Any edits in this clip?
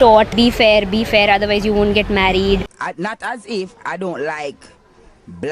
yes; 1 cut; at 2.6 s

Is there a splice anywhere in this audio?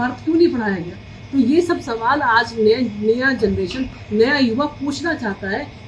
no; 0 cuts

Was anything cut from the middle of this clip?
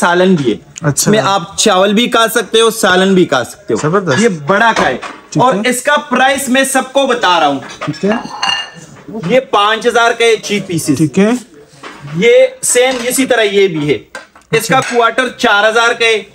no; 0 cuts

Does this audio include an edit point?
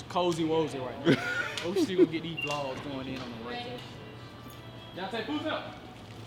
no; 0 cuts

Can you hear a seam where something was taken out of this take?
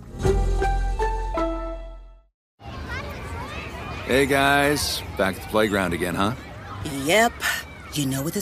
yes; 1 cut; at 2.4 s

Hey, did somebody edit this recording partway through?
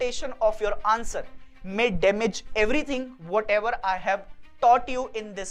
no; 0 cuts

